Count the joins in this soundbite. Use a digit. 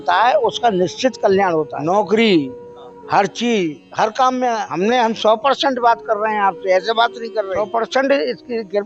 3